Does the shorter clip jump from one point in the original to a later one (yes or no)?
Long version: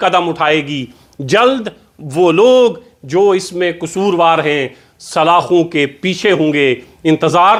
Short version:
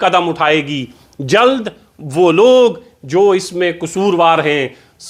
no